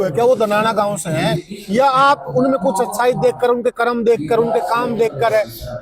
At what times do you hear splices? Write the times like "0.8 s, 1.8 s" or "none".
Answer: none